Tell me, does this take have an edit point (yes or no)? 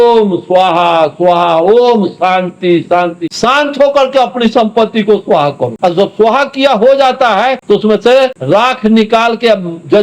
yes